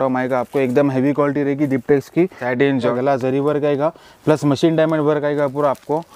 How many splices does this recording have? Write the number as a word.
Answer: one